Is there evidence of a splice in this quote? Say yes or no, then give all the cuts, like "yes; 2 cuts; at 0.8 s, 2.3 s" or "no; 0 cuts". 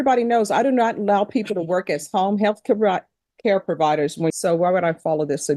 yes; 1 cut; at 4.3 s